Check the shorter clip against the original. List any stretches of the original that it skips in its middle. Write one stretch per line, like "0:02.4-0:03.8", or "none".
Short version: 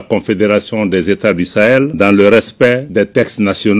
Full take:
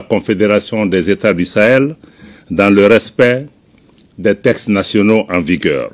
0:01.9-0:02.5
0:03.4-0:04.1